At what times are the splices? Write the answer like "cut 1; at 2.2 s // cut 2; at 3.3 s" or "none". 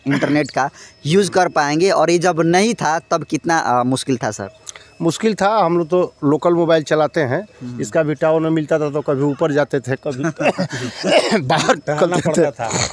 none